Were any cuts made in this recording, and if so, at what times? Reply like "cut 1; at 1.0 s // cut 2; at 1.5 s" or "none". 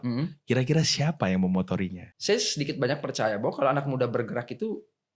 cut 1; at 2.1 s